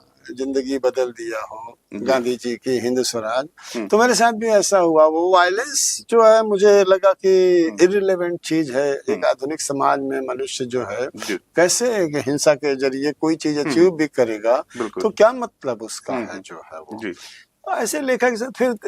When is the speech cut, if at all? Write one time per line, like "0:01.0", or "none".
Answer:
none